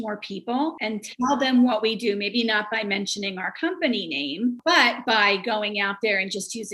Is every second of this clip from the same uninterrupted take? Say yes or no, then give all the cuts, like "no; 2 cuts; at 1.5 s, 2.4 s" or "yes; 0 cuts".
no; 2 cuts; at 0.8 s, 4.6 s